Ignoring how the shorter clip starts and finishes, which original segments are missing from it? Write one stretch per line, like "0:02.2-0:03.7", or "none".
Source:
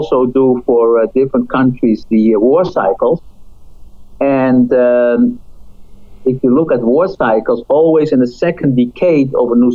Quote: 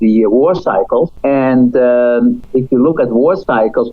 0:03.2-0:04.1
0:05.4-0:06.1